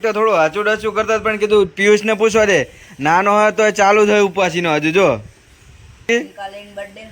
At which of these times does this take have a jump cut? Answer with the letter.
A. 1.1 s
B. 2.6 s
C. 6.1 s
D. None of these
C